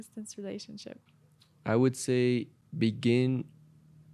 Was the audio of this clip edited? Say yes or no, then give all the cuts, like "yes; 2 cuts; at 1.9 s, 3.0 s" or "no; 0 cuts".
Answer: yes; 2 cuts; at 1.0 s, 2.6 s